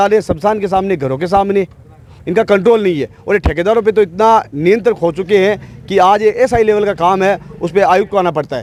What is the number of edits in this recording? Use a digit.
0